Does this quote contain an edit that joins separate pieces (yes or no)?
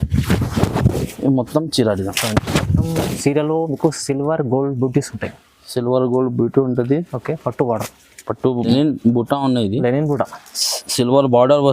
yes